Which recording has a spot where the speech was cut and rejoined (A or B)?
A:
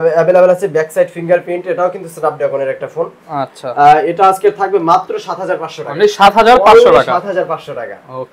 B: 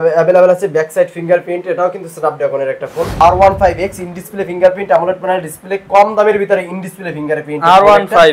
B